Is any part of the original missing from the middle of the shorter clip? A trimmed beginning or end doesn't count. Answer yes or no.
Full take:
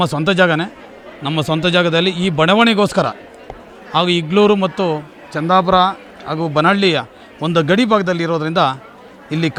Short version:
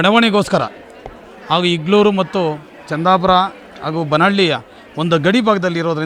no